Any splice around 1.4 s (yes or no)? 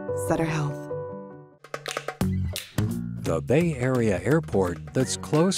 yes